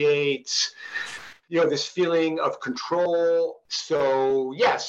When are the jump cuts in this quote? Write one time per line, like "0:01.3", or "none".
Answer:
0:03.6